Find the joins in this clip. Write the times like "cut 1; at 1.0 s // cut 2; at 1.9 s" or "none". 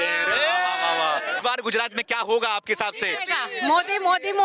cut 1; at 1.4 s